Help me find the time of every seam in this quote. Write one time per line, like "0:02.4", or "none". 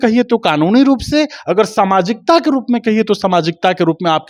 none